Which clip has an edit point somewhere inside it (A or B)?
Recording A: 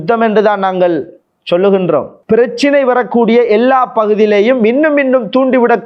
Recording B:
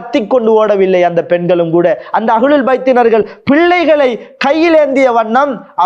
A